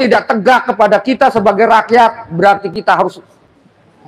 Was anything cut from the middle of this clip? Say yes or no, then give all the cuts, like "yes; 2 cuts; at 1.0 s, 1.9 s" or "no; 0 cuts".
no; 0 cuts